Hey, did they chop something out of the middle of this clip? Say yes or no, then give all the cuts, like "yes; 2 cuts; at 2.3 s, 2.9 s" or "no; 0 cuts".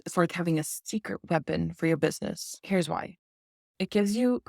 yes; 1 cut; at 2.5 s